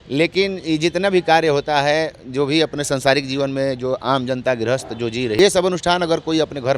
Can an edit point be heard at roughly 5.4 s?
yes; 1 cut; at 5.4 s

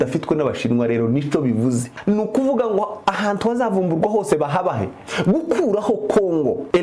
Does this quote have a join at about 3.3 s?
no; 2 cuts; at 1.9 s, 5.0 s

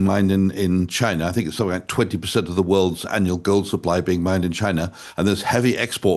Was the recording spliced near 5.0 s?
yes; 1 cut; at 5.0 s

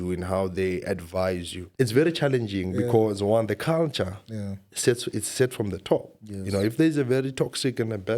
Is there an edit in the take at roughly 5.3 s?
no; 1 cut; at 1.6 s

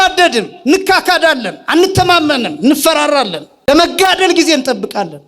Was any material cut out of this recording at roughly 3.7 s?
yes; 1 cut; at 3.7 s

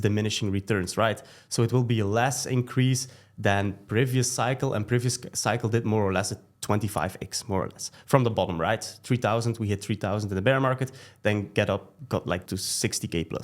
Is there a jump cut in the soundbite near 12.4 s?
yes; 1 cut; at 12.4 s

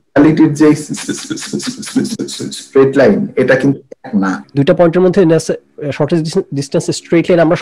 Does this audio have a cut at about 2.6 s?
no; 1 cut; at 4.4 s

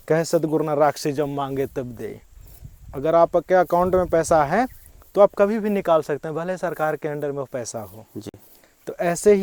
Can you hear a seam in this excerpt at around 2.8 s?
no; 0 cuts

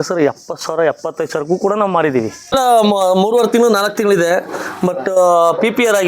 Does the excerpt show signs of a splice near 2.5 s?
yes; 1 cut; at 2.5 s

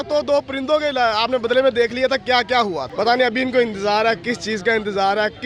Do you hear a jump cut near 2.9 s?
yes; 1 cut; at 2.9 s

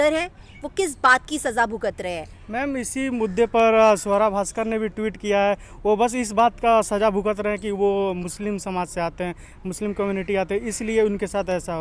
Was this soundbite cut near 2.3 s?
no; 0 cuts

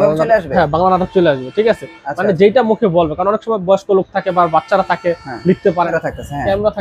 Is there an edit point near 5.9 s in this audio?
yes; 1 cut; at 5.9 s

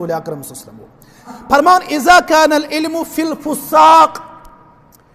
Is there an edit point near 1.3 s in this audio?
yes; 1 cut; at 1.3 s

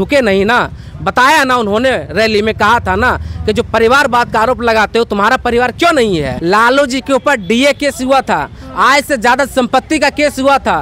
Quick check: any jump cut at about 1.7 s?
no; 1 cut; at 6.3 s

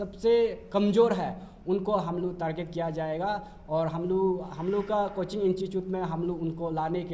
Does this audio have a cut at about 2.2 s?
no; 0 cuts

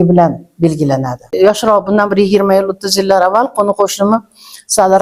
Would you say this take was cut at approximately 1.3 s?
yes; 1 cut; at 1.3 s

